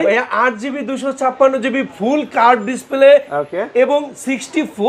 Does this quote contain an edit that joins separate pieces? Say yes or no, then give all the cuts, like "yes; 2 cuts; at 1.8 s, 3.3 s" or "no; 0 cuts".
no; 0 cuts